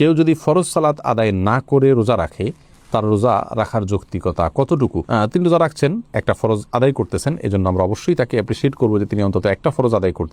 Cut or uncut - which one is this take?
uncut